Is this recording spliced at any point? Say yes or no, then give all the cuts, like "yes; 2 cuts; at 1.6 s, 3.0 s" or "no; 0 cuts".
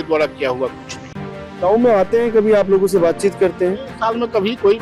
no; 0 cuts